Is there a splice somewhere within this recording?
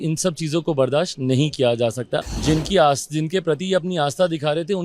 yes; 1 cut; at 2.2 s

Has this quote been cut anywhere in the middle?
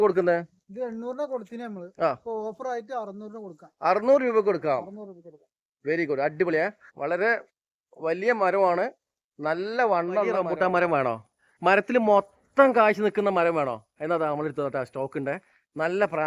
yes; 1 cut; at 10.5 s

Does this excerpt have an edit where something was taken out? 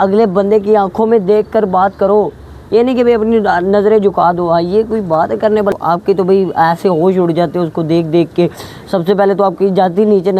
yes; 1 cut; at 5.7 s

